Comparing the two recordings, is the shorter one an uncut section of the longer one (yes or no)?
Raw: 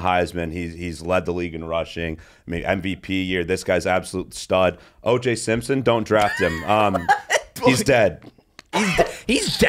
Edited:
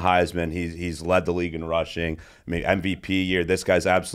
yes